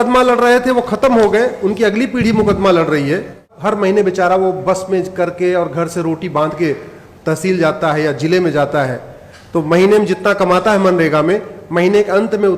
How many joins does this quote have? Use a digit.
1